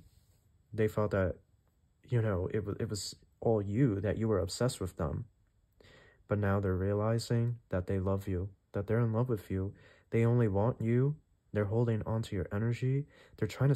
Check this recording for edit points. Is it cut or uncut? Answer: uncut